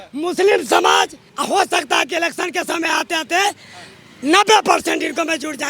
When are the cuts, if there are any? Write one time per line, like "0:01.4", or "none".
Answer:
0:01.2